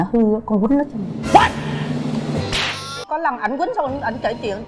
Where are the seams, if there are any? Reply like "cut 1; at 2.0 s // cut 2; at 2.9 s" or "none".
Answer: cut 1; at 3.0 s